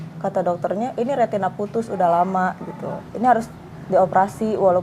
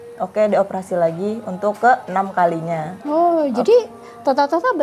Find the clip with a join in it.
first; 1 cut; at 3.0 s

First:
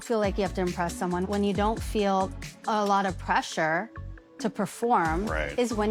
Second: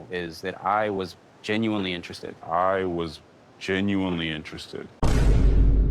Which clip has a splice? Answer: second; 1 cut; at 5.0 s

